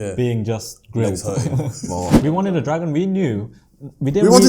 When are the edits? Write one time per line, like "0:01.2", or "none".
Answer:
0:02.2